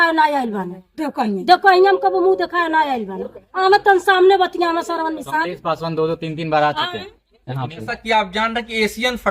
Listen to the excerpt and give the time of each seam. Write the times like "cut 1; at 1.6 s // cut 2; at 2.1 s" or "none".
cut 1; at 7.9 s